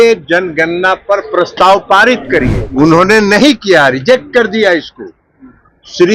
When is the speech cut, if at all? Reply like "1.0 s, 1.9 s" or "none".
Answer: 2.6 s